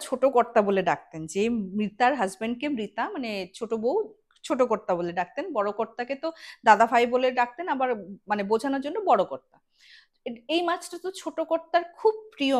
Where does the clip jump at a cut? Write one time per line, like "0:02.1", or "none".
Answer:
none